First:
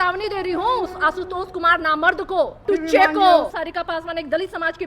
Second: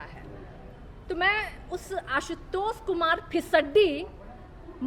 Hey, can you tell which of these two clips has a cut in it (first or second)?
first